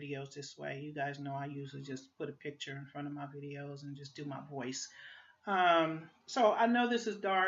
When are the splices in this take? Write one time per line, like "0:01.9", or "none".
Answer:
none